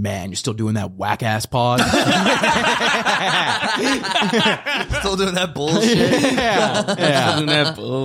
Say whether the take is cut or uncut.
uncut